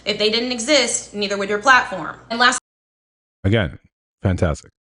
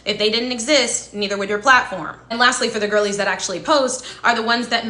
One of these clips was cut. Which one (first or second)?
second